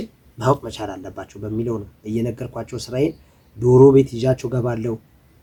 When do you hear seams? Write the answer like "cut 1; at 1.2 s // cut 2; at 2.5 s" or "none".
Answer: none